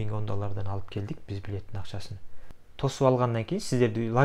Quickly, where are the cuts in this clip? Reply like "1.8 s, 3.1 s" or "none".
2.7 s